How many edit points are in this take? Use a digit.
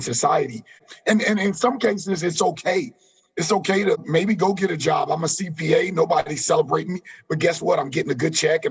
2